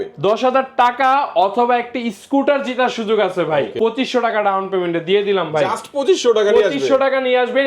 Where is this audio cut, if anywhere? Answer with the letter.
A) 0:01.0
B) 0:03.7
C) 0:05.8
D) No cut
B